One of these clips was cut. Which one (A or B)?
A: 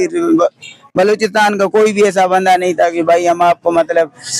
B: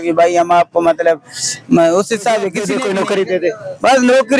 B